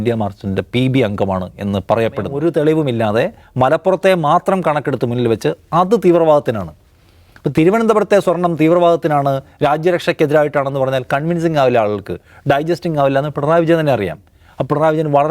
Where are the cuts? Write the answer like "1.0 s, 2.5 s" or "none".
2.3 s